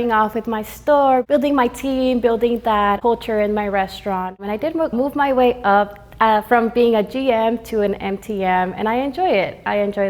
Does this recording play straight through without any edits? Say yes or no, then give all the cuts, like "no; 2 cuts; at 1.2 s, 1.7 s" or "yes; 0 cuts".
no; 3 cuts; at 1.2 s, 3.0 s, 4.9 s